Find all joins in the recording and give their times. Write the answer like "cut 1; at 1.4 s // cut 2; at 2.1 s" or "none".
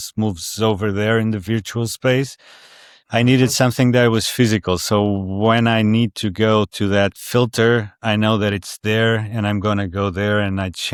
none